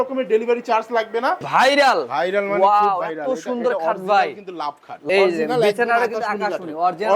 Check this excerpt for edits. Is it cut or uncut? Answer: cut